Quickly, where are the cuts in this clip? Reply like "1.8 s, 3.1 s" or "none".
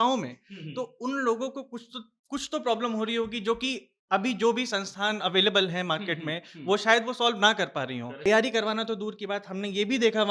8.2 s

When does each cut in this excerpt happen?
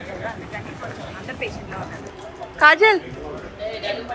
2.1 s

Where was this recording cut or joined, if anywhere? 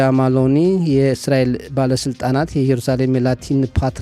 none

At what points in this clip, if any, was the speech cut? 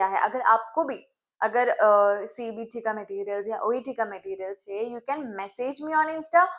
none

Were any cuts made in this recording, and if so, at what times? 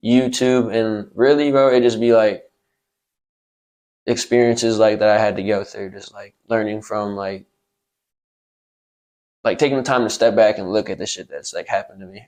none

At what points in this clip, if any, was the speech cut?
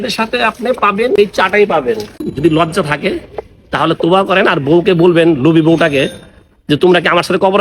1.2 s, 2.2 s

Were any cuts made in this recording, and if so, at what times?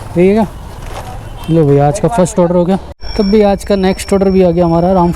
2.9 s

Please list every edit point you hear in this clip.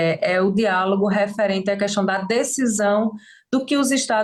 none

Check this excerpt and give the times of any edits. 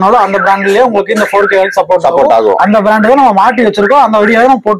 none

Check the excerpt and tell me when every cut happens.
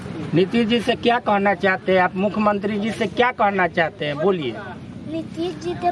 none

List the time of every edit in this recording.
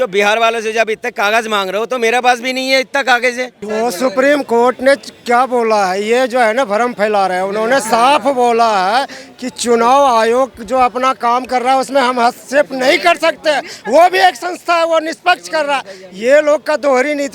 3.6 s

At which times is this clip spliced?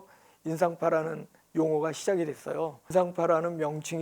2.8 s

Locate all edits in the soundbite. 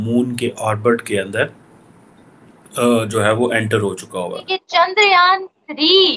4.4 s

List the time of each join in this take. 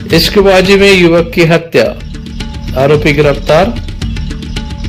none

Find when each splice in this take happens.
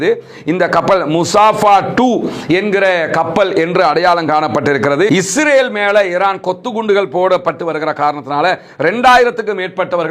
5.1 s

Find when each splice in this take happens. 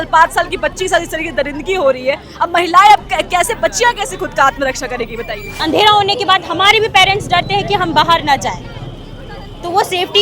5.6 s

